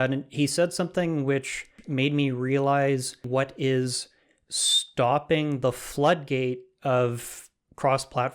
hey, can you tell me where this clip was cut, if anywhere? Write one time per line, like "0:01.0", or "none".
0:01.8
0:03.3